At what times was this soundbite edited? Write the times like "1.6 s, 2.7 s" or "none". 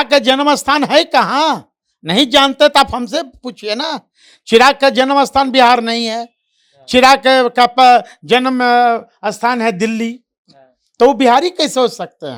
none